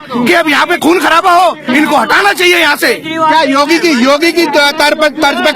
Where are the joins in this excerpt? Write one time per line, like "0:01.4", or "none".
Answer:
none